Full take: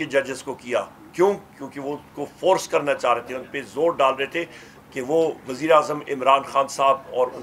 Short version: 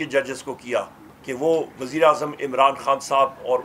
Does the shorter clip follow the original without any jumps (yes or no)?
no